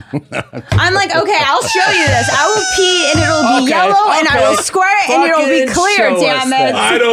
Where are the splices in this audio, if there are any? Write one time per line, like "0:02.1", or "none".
none